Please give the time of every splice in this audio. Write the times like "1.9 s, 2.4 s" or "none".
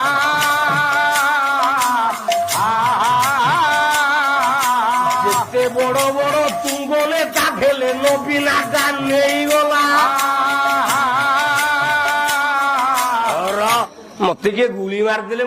14.0 s